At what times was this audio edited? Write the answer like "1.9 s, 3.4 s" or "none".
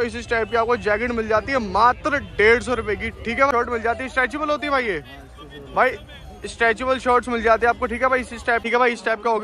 3.5 s, 8.6 s

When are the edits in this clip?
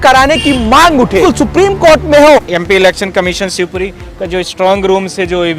1.2 s, 2.4 s

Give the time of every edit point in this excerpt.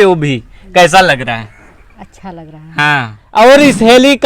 3.2 s

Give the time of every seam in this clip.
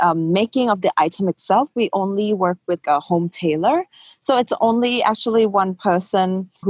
none

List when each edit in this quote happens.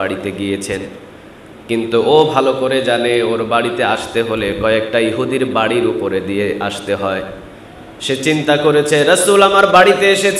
none

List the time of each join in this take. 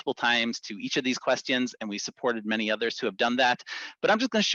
none

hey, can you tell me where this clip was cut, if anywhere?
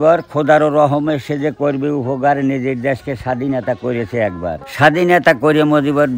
4.7 s

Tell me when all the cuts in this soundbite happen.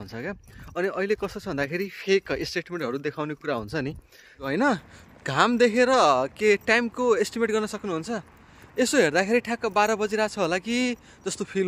4.4 s

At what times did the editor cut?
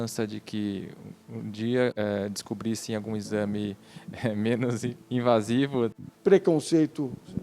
1.9 s, 5.9 s

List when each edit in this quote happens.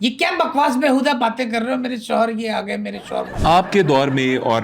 3.3 s

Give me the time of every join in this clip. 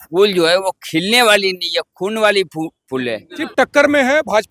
3.4 s

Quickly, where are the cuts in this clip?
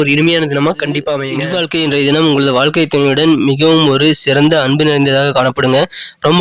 1.4 s

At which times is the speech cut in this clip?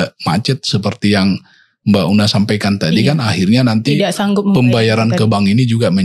none

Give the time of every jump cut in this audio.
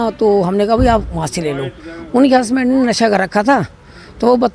none

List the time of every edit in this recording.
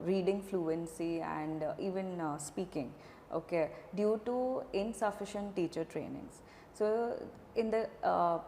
none

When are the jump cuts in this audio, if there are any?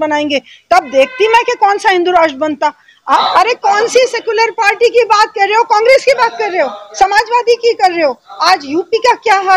3.2 s

